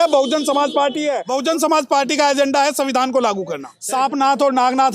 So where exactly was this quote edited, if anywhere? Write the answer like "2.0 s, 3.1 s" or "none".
1.3 s, 3.7 s